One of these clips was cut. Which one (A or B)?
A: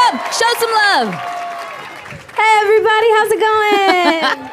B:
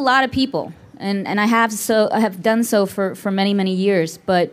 A